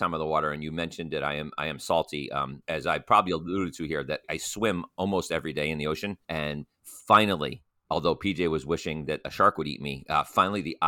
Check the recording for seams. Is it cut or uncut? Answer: cut